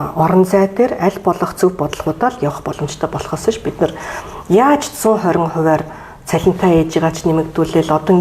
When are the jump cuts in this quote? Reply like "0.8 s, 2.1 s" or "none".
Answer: none